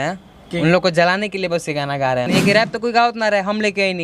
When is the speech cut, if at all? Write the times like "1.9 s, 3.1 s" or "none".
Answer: 2.3 s